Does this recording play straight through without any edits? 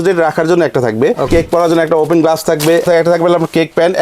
no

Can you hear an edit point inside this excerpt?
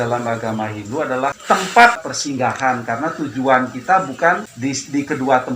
yes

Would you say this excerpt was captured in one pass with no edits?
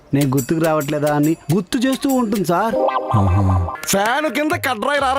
no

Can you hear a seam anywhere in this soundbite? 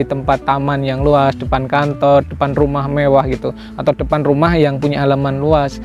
no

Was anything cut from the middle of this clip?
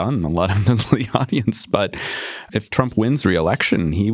no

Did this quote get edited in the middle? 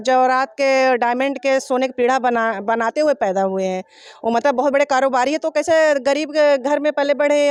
no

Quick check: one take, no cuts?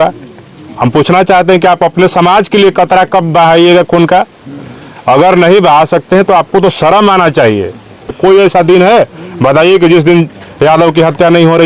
no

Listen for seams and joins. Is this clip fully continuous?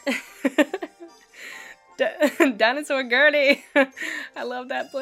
yes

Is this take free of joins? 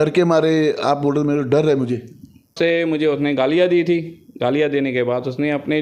no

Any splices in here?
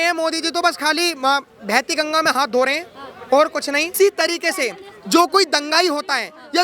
yes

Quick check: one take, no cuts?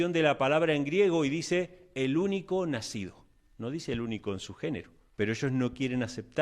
no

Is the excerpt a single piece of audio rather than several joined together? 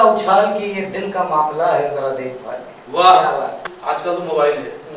no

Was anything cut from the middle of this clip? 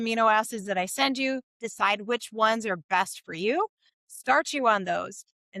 no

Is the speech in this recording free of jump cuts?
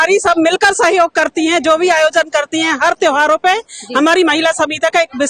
yes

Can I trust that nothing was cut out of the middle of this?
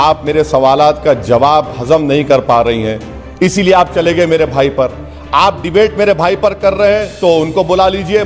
yes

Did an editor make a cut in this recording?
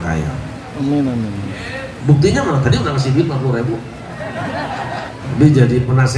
yes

